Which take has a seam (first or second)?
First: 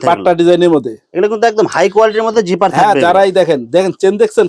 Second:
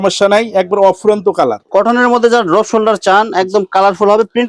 second